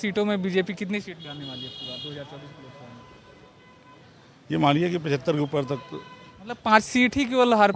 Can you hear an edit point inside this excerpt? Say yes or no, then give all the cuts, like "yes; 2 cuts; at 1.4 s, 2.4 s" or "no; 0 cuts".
no; 0 cuts